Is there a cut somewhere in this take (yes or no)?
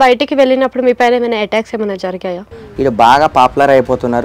yes